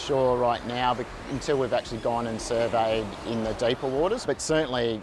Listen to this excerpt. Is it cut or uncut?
uncut